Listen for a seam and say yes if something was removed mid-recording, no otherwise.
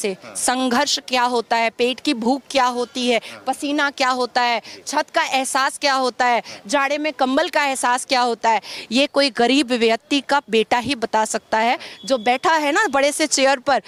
no